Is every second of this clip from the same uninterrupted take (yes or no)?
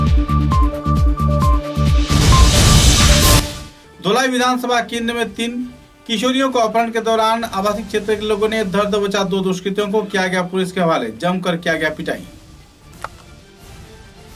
no